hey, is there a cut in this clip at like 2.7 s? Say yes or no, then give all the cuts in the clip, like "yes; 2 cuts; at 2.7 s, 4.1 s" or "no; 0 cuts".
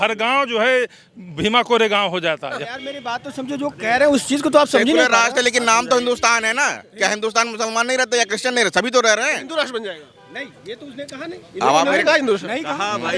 yes; 1 cut; at 2.7 s